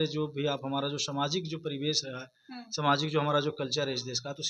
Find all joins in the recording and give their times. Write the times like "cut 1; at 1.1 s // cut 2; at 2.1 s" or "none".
none